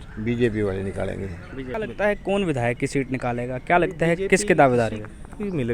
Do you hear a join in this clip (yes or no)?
yes